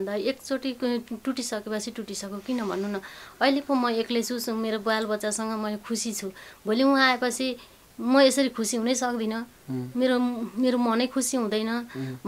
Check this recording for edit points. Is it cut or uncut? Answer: uncut